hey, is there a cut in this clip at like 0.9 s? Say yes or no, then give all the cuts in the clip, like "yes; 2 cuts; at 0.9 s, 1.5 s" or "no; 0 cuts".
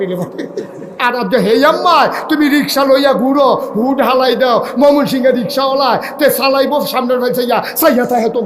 yes; 1 cut; at 0.9 s